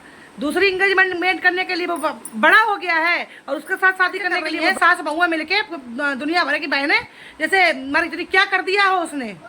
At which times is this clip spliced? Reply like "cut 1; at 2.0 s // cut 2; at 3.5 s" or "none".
cut 1; at 4.5 s